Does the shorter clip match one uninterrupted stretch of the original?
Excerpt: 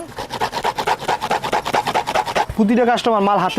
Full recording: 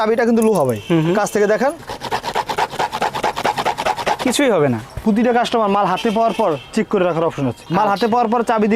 no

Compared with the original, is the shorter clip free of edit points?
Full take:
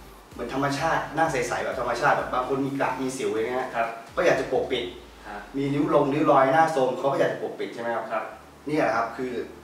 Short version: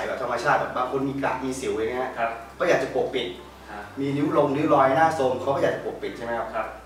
yes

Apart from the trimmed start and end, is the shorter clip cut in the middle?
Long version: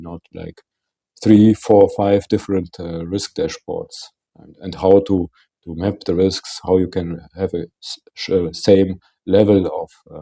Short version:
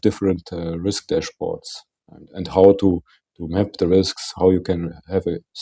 no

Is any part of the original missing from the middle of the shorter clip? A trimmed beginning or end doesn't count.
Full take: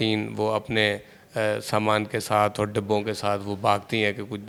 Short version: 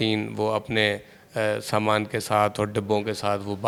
no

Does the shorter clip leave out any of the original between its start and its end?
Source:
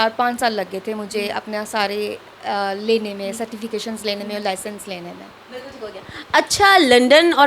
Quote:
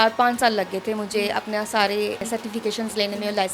yes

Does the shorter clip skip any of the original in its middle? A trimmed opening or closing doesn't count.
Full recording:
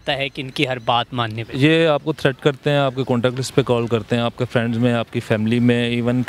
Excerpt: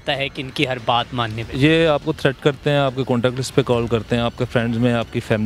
no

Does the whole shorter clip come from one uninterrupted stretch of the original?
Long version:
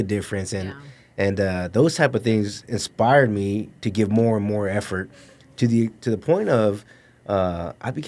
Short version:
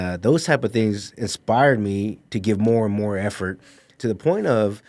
no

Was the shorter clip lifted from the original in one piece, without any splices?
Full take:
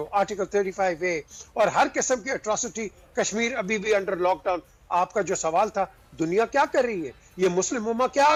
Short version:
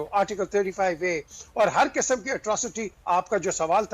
no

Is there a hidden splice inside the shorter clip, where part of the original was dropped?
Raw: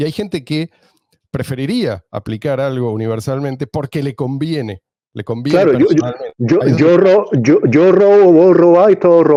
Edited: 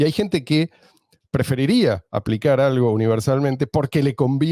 no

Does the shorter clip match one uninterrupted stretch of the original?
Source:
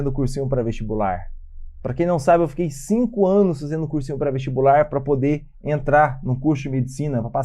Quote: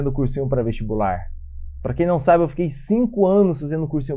yes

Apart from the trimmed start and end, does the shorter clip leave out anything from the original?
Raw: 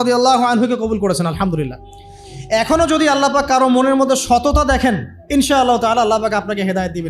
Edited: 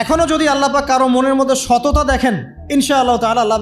no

